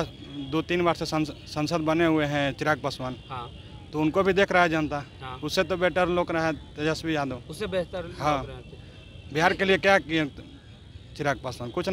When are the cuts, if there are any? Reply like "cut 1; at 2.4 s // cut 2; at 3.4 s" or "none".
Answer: none